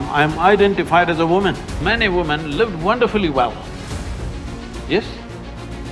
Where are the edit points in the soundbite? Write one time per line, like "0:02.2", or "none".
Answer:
0:01.7